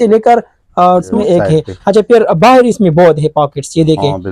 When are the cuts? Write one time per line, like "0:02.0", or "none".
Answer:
0:01.1

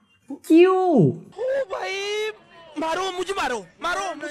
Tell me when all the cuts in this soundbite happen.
0:01.3

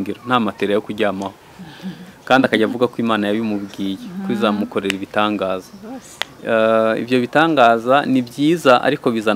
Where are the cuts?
none

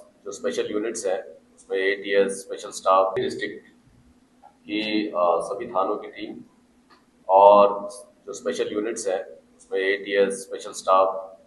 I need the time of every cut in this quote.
0:03.1

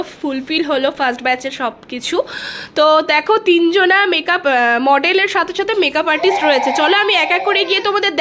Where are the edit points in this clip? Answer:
none

